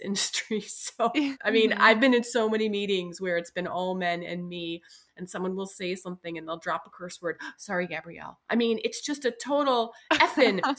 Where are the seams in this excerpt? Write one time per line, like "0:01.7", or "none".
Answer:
0:01.4